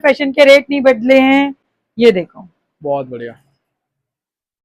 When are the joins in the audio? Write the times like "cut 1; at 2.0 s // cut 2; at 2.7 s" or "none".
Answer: none

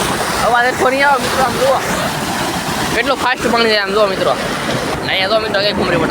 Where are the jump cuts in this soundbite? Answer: cut 1; at 5.0 s

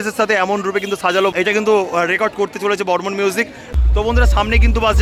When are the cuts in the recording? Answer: none

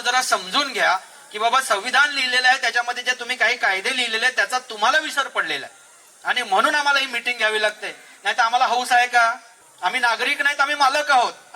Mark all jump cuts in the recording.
cut 1; at 9.6 s

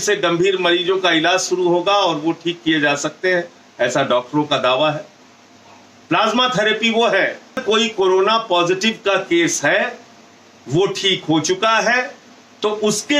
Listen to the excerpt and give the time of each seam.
cut 1; at 7.6 s

